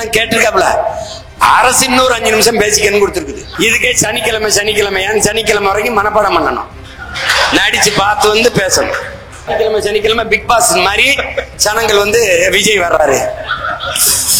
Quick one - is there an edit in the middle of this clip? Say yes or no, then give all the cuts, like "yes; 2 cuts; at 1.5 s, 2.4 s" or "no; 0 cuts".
yes; 2 cuts; at 3.5 s, 9.5 s